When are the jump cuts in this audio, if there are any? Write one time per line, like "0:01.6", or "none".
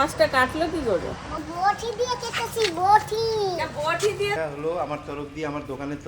0:01.4
0:04.4